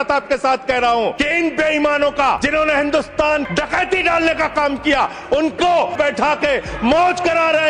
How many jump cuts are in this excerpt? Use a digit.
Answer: 4